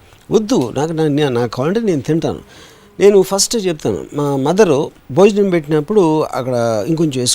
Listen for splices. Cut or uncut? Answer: uncut